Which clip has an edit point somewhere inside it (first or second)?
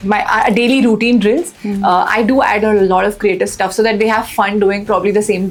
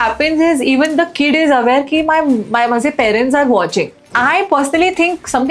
second